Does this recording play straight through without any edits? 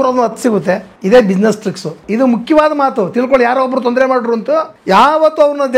no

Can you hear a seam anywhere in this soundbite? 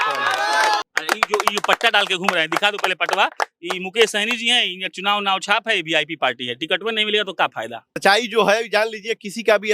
yes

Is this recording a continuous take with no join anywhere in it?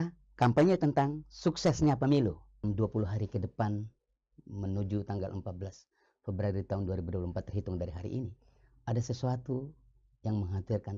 no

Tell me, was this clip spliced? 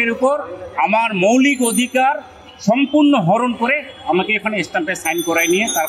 no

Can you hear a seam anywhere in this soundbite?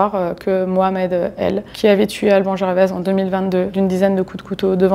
yes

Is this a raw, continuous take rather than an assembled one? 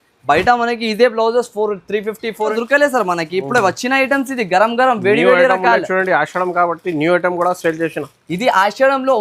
no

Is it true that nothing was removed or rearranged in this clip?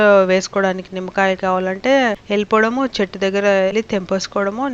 no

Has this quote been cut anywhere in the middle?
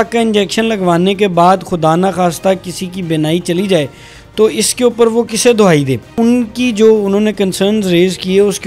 yes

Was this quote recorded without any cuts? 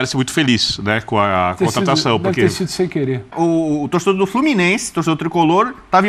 no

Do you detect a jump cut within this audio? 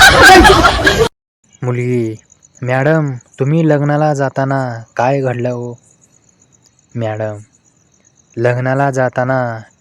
yes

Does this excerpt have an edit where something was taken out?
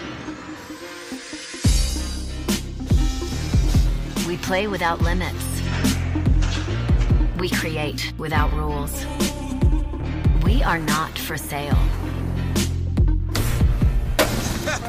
no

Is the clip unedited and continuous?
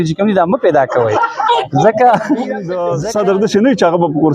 no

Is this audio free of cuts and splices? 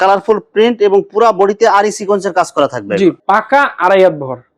no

